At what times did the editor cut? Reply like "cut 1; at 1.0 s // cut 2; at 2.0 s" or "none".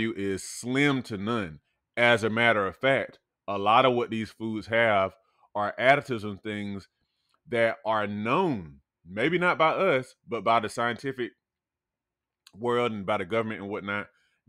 none